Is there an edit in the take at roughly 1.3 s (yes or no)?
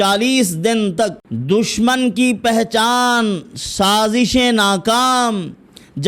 yes